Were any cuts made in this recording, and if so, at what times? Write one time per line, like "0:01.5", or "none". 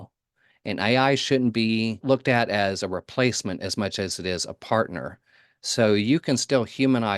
0:02.0